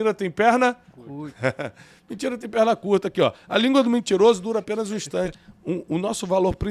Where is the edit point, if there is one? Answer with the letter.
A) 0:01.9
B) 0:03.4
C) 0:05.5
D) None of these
C